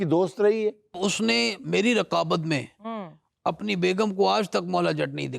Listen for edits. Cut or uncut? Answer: cut